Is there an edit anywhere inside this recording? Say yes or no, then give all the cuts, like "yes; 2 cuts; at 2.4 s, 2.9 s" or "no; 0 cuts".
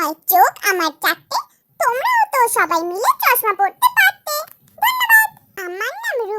yes; 1 cut; at 5.5 s